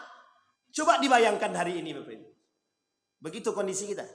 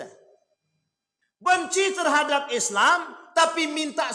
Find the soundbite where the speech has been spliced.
second; 1 cut; at 1.5 s

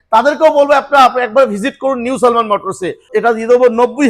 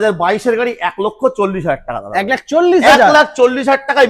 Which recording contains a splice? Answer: first; 1 cut; at 3.1 s

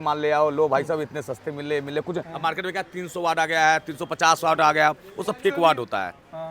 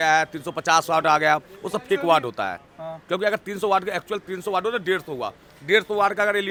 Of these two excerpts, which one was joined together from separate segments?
first; 1 cut; at 2.3 s

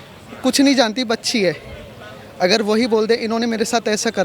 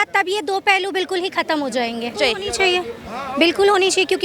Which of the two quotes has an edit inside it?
second; 1 cut; at 2.1 s

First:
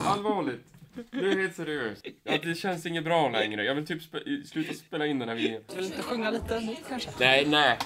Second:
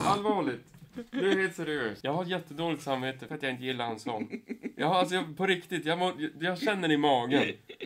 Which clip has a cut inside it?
first; 2 cuts; at 2.0 s, 5.6 s

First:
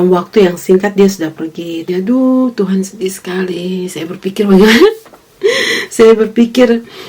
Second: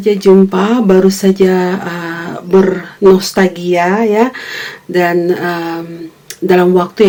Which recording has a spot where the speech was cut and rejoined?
first; 1 cut; at 1.9 s

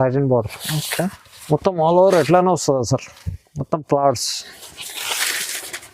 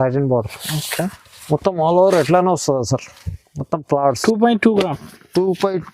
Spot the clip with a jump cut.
second; 1 cut; at 4.2 s

